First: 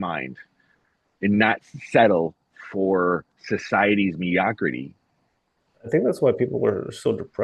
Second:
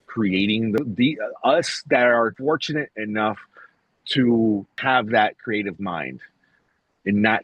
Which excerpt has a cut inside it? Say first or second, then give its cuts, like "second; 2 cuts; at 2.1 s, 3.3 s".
second; 3 cuts; at 0.8 s, 2.4 s, 4.7 s